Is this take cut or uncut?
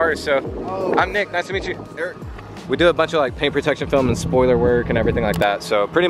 cut